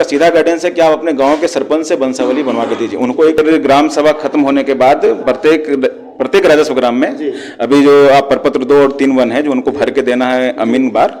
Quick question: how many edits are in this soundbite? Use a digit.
1